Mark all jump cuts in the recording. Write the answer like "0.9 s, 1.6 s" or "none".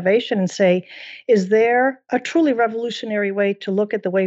2.0 s